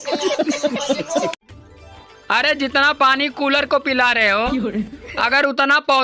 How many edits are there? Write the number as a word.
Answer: one